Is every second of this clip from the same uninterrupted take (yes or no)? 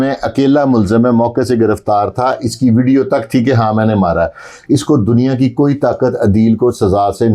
yes